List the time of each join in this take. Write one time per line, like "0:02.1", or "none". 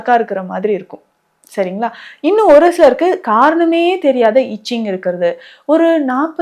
none